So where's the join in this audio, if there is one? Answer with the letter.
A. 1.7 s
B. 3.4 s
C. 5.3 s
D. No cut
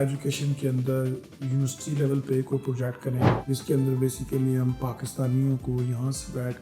B